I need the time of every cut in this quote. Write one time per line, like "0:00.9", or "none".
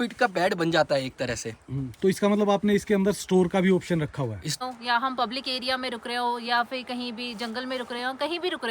0:04.6